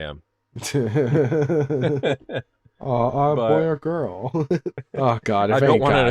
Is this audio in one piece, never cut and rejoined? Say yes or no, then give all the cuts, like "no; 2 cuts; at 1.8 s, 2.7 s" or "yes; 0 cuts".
no; 1 cut; at 4.8 s